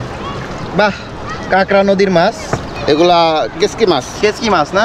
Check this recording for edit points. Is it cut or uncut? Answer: cut